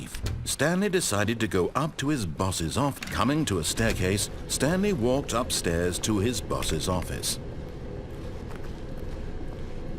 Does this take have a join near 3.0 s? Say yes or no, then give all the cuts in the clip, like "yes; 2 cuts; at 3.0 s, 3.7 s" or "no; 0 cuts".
yes; 1 cut; at 3.0 s